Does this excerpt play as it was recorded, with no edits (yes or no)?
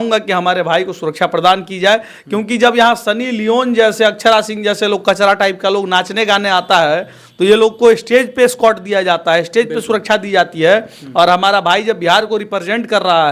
yes